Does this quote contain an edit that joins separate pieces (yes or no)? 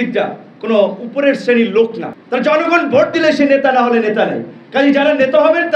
yes